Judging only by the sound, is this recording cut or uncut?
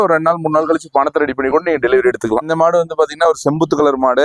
uncut